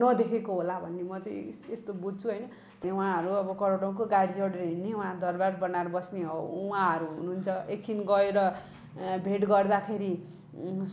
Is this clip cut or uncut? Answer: cut